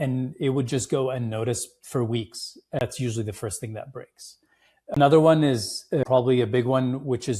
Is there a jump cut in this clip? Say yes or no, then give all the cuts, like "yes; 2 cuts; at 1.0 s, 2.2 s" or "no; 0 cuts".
yes; 3 cuts; at 2.8 s, 5.0 s, 6.0 s